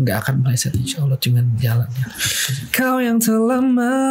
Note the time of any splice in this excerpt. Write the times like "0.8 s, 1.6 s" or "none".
2.6 s